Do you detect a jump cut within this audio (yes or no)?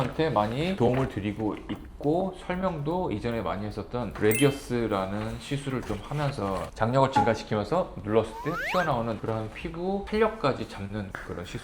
no